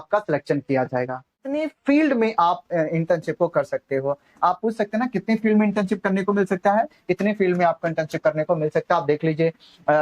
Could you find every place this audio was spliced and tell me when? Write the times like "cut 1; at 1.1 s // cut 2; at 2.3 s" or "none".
cut 1; at 1.5 s